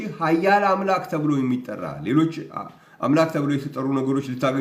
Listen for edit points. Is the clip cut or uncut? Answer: uncut